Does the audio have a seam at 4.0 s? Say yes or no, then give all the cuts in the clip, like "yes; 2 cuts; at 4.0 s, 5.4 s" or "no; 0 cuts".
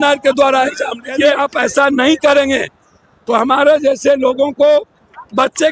no; 1 cut; at 1.4 s